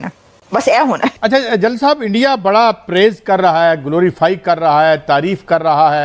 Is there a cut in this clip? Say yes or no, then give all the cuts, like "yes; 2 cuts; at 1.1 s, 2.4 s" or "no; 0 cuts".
yes; 1 cut; at 1.2 s